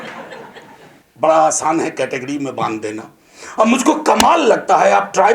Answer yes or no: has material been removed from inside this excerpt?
yes